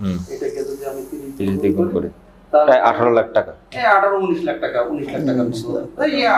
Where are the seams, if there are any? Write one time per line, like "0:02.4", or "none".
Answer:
none